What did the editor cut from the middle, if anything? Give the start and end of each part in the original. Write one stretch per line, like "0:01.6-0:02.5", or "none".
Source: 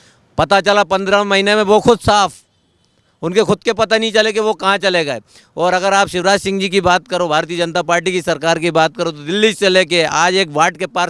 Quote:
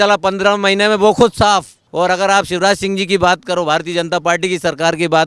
0:02.5-0:05.4